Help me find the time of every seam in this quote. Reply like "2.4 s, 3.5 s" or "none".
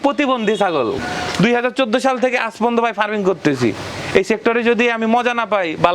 1.0 s